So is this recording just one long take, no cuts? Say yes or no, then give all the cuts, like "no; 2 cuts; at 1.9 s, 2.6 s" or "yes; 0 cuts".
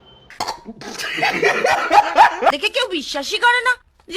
no; 1 cut; at 2.5 s